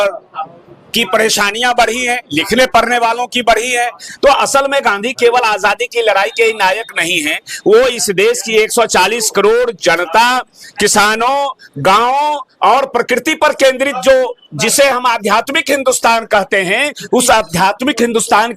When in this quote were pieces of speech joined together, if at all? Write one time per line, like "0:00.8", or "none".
0:04.0

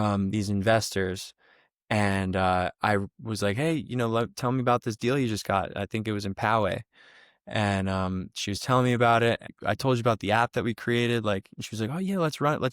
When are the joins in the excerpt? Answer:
0:09.5

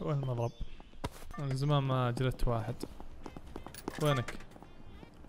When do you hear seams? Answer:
0:01.2

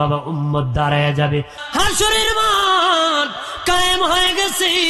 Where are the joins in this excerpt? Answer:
0:01.6

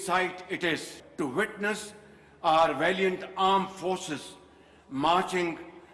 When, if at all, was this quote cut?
0:01.0

